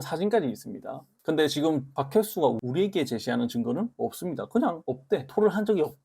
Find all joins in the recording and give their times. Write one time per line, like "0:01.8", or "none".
0:01.1